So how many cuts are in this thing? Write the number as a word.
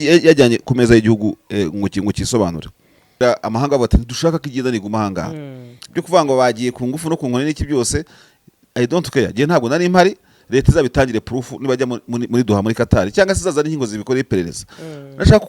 one